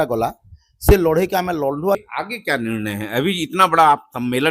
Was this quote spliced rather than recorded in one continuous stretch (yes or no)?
yes